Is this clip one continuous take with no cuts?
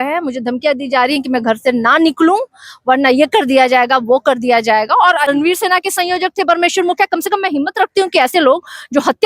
no; 1 cut; at 5.3 s

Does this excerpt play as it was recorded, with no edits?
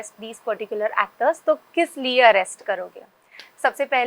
yes; 0 cuts

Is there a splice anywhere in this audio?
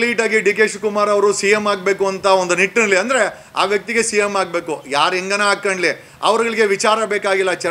no; 0 cuts

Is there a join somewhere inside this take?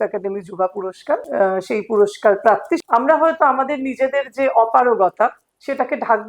yes; 2 cuts; at 1.3 s, 2.8 s

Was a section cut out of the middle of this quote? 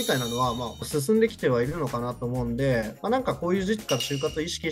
no; 0 cuts

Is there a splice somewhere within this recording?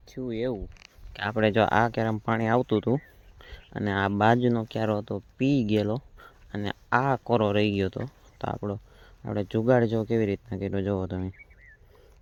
no; 0 cuts

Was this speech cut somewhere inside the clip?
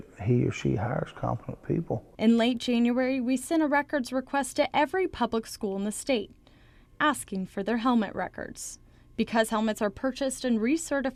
no; 0 cuts

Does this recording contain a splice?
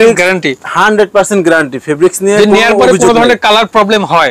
no; 0 cuts

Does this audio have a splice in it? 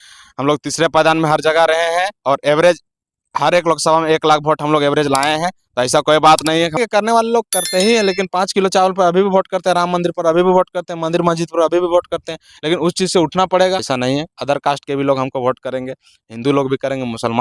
yes; 2 cuts; at 6.8 s, 13.8 s

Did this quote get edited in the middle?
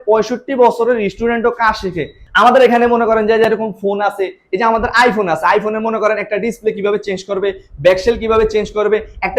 yes; 1 cut; at 2.2 s

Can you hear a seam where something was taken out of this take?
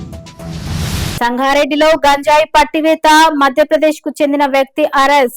yes; 1 cut; at 1.2 s

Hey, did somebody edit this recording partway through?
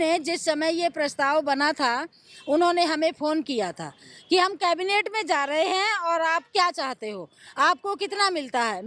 no; 0 cuts

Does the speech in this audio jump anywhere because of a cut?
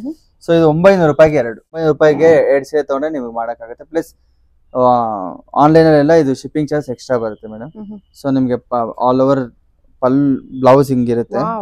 yes; 1 cut; at 1.8 s

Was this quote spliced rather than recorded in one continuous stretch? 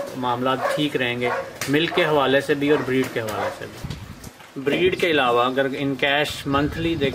yes; 1 cut; at 3.9 s

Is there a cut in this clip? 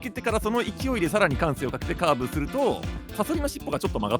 yes; 1 cut; at 3.1 s

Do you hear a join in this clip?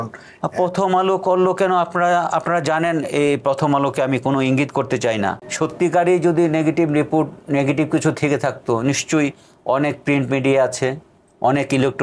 yes; 1 cut; at 5.4 s

